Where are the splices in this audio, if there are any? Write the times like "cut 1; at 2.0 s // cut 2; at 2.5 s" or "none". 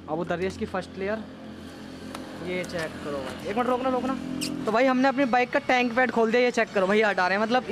cut 1; at 4.6 s